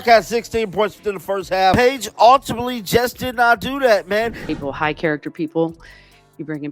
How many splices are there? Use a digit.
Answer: 1